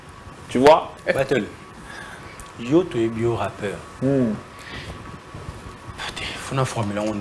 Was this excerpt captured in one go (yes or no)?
yes